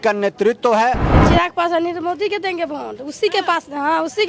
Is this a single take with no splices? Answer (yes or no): no